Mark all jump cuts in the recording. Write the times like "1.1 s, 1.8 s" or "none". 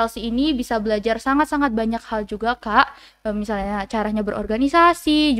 none